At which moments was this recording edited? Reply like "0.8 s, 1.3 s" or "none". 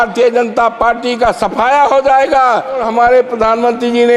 2.9 s